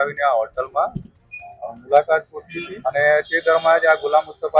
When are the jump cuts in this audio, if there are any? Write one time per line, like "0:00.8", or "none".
0:02.7